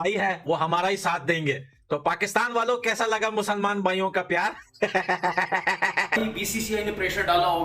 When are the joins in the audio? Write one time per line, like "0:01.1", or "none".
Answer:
0:06.2

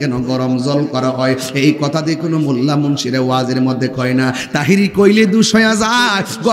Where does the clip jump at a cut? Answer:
none

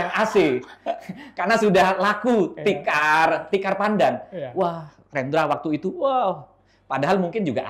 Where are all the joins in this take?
none

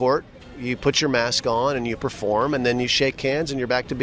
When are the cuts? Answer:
none

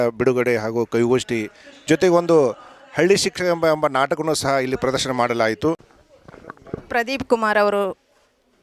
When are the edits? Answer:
0:05.9

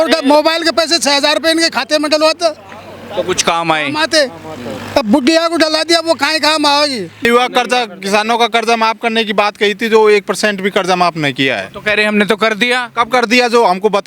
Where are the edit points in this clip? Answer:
0:07.2

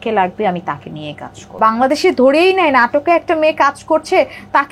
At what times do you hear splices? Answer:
0:01.6

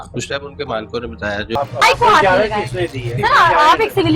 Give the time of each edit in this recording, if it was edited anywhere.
0:01.5

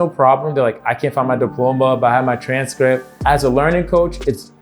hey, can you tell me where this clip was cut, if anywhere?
0:03.1

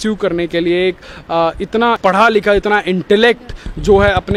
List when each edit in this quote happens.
none

